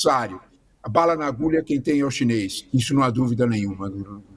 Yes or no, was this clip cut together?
no